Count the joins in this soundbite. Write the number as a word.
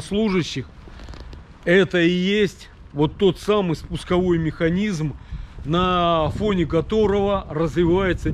zero